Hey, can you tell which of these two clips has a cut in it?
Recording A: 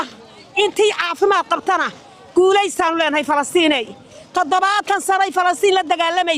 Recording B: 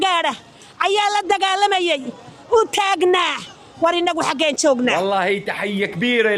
B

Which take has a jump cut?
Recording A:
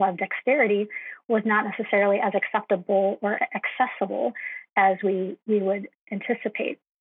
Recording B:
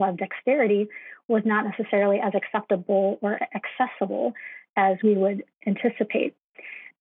B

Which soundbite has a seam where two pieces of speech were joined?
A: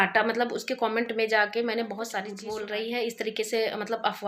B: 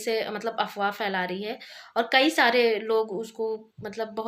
A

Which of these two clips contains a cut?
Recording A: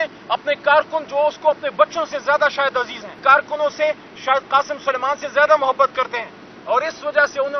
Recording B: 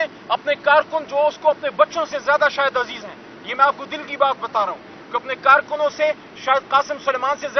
A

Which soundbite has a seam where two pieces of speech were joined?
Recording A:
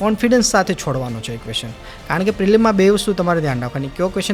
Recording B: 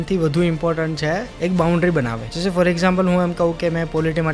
B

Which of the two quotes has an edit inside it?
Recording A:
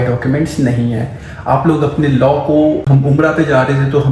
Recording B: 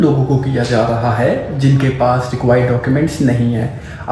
A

